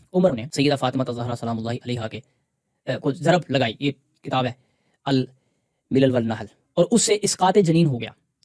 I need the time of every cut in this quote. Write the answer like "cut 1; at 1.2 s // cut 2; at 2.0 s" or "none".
none